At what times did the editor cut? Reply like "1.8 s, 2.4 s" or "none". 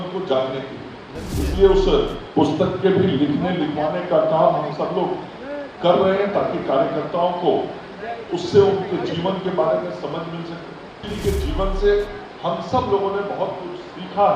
11.1 s